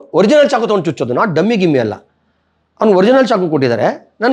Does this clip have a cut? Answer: no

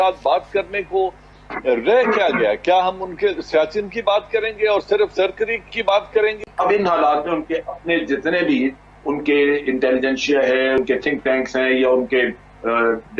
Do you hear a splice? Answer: yes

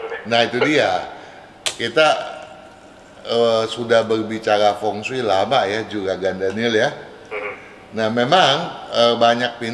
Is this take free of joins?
yes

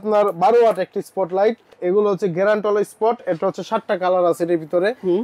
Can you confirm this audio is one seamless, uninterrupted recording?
no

